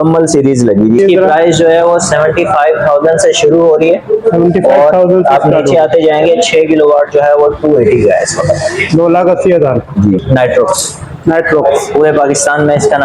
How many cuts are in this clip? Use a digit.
2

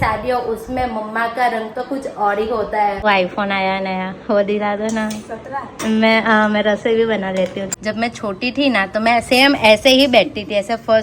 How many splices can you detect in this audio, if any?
2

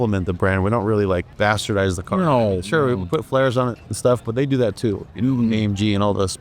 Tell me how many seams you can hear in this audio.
1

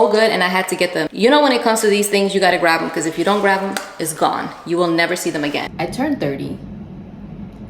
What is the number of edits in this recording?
2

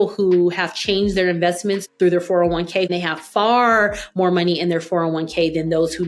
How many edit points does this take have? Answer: 2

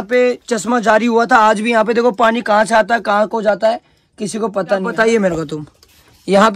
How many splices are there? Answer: 1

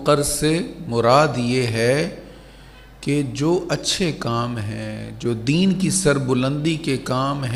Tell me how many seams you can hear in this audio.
0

